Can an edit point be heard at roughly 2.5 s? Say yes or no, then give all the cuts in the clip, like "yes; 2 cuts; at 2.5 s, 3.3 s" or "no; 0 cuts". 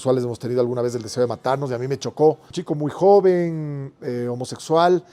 yes; 1 cut; at 2.5 s